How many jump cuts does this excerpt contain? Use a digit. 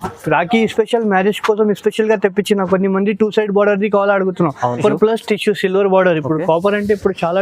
1